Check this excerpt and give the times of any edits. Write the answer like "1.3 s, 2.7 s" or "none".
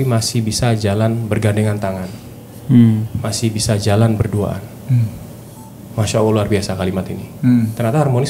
none